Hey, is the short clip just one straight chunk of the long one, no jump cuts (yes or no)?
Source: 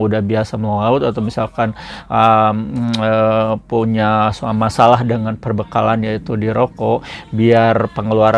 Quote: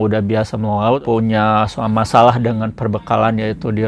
no